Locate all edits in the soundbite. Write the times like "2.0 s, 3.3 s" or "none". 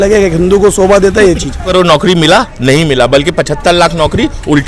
1.7 s